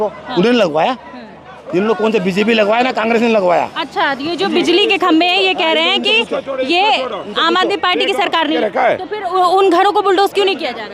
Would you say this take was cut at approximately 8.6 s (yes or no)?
yes